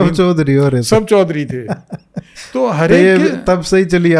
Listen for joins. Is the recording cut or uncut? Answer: uncut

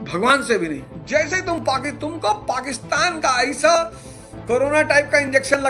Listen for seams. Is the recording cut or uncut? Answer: cut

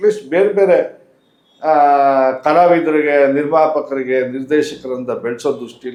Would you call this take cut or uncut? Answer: uncut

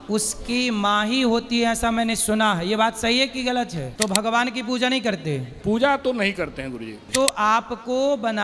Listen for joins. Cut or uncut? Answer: cut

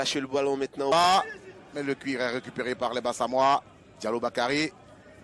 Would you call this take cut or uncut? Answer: cut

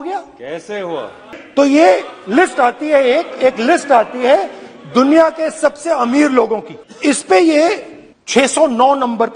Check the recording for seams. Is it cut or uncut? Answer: cut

